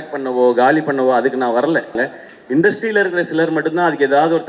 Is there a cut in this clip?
yes; 1 cut; at 1.9 s

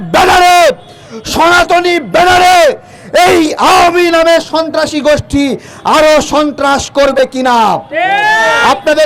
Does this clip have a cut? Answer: no; 0 cuts

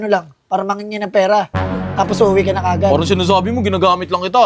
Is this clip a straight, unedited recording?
yes; 0 cuts

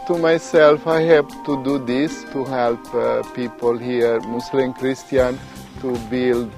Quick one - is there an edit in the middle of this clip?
yes; 1 cut; at 2.3 s

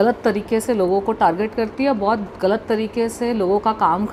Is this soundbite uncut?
yes; 0 cuts

